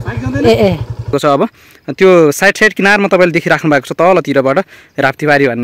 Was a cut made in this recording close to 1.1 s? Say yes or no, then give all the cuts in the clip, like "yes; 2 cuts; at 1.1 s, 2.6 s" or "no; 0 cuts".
yes; 1 cut; at 1.1 s